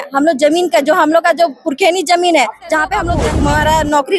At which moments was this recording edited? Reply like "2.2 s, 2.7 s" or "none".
3.1 s